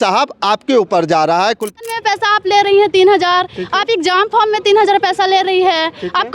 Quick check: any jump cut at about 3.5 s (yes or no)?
no